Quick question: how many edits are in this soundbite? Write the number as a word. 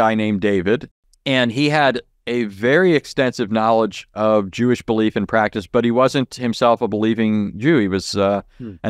one